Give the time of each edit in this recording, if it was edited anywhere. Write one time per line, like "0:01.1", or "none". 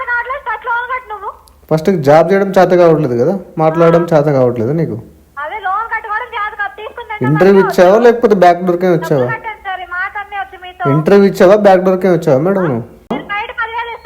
0:13.1